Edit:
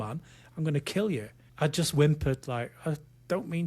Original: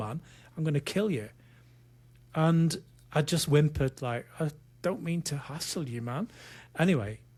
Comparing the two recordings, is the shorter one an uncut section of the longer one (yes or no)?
no